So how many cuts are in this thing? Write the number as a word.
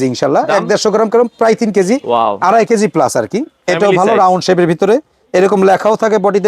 one